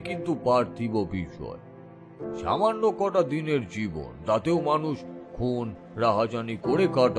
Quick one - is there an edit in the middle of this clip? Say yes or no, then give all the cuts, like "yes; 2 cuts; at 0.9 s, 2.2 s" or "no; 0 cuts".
no; 0 cuts